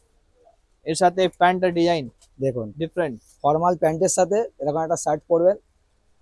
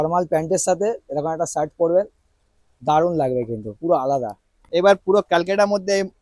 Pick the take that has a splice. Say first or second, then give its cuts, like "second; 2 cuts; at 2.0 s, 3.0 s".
second; 1 cut; at 4.6 s